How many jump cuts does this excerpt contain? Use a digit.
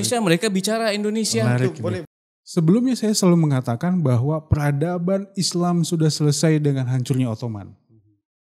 1